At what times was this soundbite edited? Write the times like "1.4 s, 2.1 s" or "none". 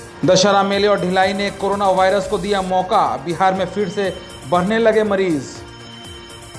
none